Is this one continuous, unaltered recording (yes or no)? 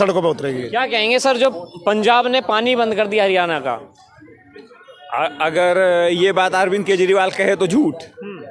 yes